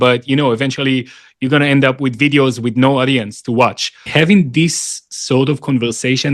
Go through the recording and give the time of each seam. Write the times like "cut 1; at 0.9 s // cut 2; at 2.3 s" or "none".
cut 1; at 4.0 s